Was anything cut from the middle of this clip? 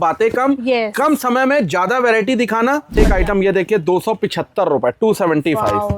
yes; 1 cut; at 3.0 s

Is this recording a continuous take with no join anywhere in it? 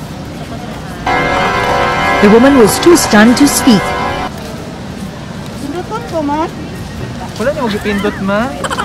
yes; 0 cuts

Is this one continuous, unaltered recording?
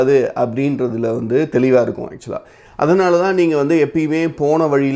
yes; 0 cuts

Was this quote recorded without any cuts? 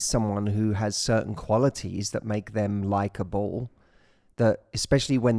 yes; 0 cuts

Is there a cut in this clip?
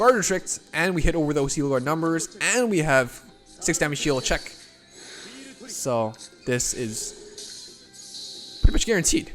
no; 0 cuts

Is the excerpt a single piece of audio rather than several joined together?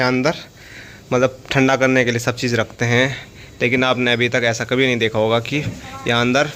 yes; 0 cuts

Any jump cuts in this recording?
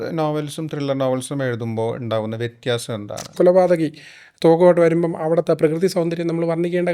yes; 1 cut; at 3.3 s

